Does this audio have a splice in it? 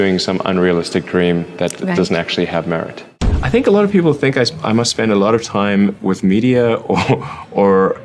yes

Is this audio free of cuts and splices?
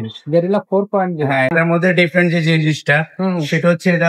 no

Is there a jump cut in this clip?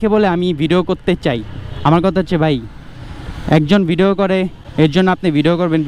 yes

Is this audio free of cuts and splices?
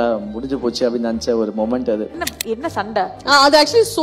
no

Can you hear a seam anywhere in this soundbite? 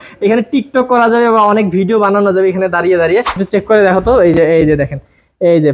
yes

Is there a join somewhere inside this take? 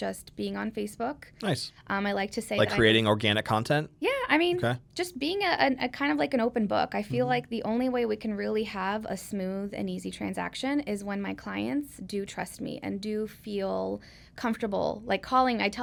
no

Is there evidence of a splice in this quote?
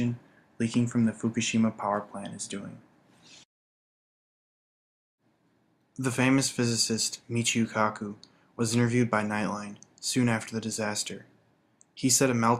no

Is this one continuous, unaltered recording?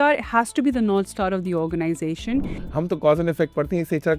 no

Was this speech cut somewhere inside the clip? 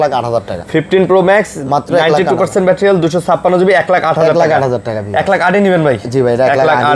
no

